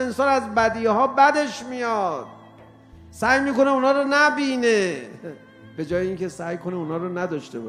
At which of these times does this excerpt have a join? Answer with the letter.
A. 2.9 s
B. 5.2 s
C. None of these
C